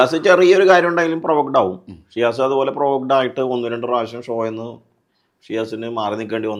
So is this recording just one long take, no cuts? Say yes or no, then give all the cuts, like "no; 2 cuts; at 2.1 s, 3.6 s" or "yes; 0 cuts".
yes; 0 cuts